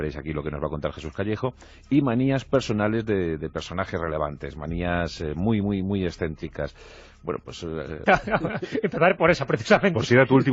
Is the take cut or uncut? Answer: uncut